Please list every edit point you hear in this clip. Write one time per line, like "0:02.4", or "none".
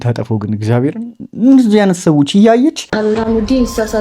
0:02.9